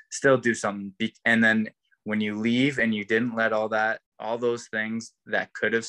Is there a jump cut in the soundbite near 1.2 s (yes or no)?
no